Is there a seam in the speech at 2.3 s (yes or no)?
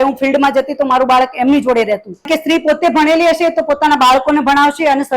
yes